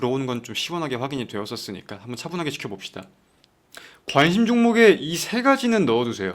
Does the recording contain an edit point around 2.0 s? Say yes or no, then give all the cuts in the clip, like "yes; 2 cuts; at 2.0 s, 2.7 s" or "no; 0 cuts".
no; 1 cut; at 3.6 s